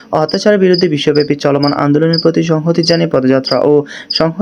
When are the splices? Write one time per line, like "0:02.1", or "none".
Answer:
none

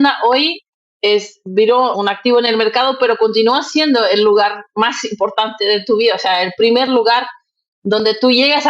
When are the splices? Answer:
0:01.9

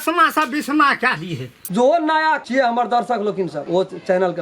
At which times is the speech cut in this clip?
0:01.6
0:02.4
0:03.6

